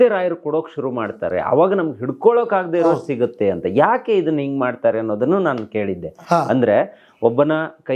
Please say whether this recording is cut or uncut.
uncut